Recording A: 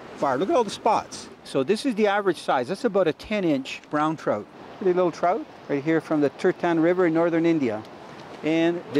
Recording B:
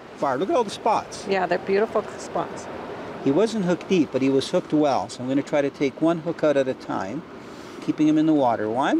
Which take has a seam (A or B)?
A